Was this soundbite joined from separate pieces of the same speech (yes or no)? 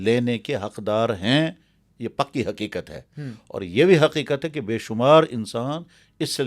no